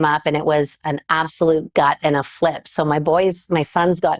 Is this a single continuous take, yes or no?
yes